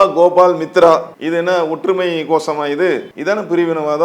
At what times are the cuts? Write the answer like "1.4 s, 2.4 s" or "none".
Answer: 1.1 s, 3.1 s

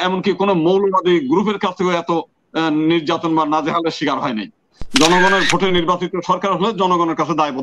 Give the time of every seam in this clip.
4.7 s

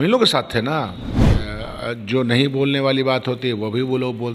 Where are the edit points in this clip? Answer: 1.4 s

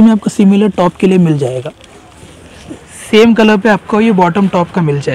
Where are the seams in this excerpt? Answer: none

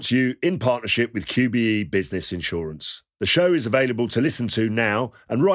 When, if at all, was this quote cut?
none

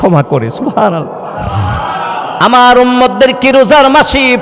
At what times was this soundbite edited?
2.3 s

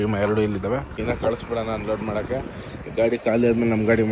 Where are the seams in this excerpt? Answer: 1.0 s

